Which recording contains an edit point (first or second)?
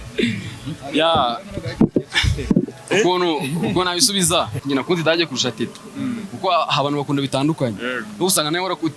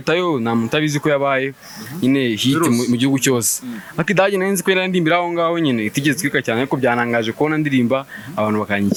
first